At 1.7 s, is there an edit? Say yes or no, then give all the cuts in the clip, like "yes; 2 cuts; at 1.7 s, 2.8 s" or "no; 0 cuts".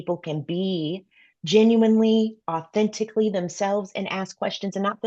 no; 0 cuts